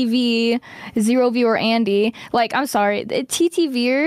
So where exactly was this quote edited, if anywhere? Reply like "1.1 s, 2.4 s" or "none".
none